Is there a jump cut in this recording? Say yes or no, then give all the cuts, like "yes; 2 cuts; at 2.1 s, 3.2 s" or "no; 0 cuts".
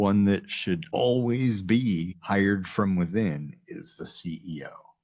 yes; 2 cuts; at 0.9 s, 2.1 s